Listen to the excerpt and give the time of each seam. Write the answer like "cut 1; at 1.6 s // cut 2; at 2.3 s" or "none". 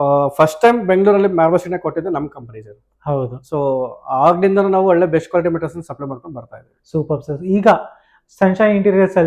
none